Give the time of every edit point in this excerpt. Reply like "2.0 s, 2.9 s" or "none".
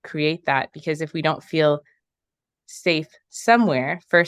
none